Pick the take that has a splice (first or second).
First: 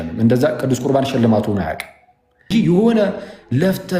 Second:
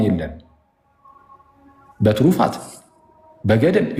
first